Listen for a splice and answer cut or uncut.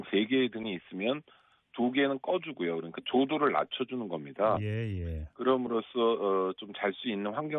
cut